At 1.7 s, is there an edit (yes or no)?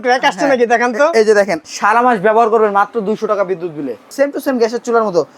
yes